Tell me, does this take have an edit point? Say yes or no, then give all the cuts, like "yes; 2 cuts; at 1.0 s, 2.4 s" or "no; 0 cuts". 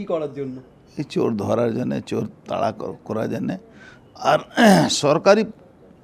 no; 0 cuts